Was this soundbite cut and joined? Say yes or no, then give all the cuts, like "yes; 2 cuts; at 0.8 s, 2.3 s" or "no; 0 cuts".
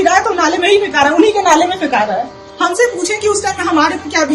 yes; 1 cut; at 2.4 s